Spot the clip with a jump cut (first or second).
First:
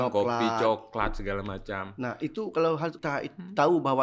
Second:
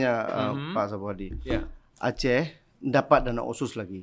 first